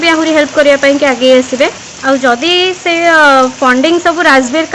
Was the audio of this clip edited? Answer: yes; 1 cut; at 1.9 s

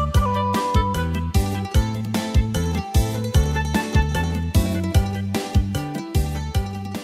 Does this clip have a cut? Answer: no; 0 cuts

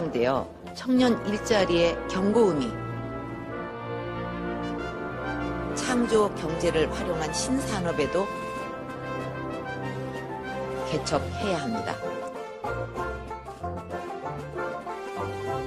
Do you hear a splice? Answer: yes; 1 cut; at 6.3 s

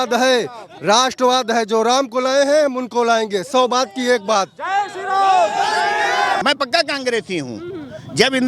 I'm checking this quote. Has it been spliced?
yes; 1 cut; at 6.4 s

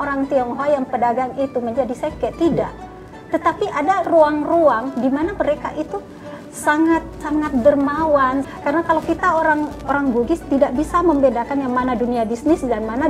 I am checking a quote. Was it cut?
yes; 2 cuts; at 7.1 s, 8.5 s

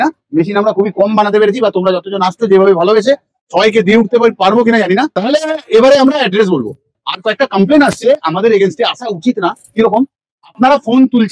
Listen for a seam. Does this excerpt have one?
yes; 1 cut; at 5.1 s

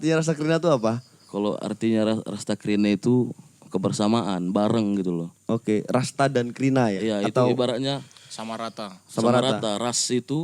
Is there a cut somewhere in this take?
yes; 1 cut; at 5.3 s

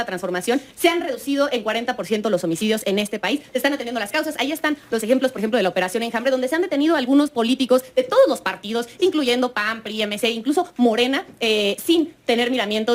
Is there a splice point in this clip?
no; 0 cuts

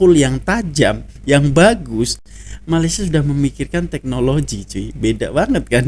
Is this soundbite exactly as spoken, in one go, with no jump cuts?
yes; 0 cuts

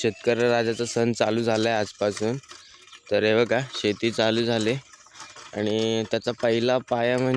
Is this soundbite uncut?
yes; 0 cuts

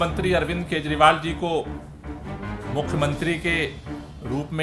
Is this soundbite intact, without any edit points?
yes; 0 cuts

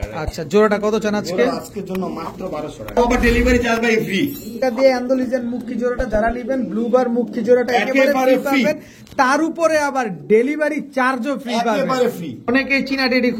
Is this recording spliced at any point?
yes; 3 cuts; at 3.0 s, 4.6 s, 12.5 s

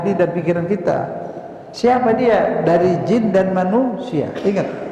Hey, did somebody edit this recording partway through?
no; 0 cuts

